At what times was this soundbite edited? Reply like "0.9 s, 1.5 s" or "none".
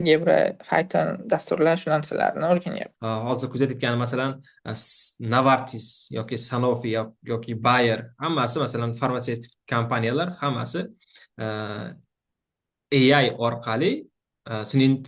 2.9 s